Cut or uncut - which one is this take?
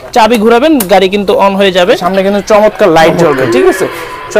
cut